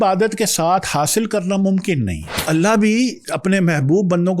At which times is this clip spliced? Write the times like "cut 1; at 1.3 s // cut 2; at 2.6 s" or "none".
cut 1; at 2.4 s